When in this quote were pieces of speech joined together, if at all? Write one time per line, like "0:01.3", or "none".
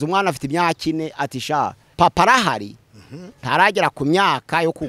0:01.9